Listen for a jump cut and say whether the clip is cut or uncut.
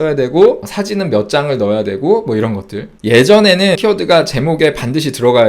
cut